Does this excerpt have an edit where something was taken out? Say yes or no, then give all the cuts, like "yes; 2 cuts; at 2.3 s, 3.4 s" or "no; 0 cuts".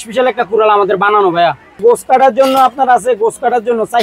yes; 1 cut; at 1.8 s